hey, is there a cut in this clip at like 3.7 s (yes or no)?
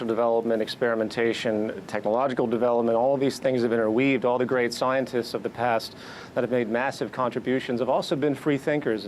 yes